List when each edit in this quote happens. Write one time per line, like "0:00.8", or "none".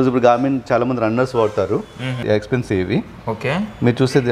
0:02.4